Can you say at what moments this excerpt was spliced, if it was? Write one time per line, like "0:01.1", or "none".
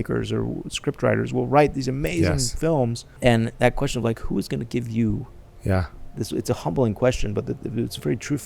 0:03.0